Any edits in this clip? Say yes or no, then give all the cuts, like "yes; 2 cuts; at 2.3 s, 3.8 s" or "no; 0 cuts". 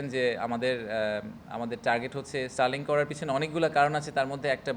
no; 0 cuts